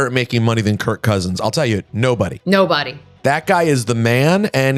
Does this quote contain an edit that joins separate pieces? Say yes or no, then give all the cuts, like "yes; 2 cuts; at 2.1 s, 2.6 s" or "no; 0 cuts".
no; 0 cuts